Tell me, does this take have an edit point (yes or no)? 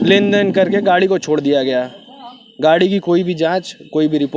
no